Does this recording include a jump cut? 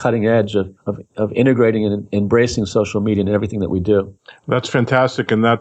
no; 0 cuts

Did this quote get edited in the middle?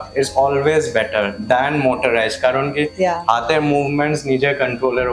no; 0 cuts

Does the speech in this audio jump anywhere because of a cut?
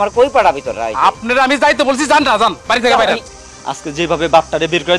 yes; 1 cut; at 3.3 s

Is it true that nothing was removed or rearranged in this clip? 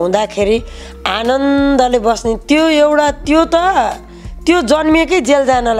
yes; 0 cuts

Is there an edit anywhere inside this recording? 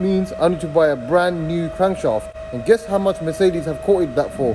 no; 0 cuts

